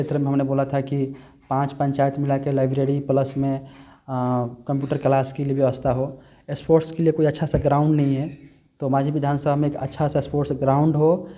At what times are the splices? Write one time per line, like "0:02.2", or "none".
none